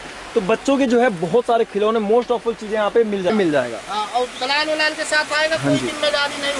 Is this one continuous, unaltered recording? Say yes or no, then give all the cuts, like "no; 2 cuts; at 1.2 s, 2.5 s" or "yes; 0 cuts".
no; 1 cut; at 3.3 s